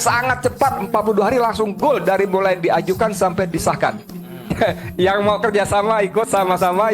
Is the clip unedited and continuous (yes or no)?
no